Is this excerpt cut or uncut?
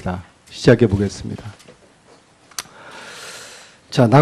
uncut